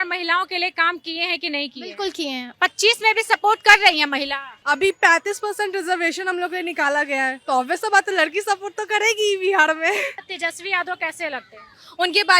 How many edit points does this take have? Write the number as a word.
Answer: three